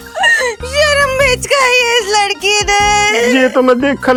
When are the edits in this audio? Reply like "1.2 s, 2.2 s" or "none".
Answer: none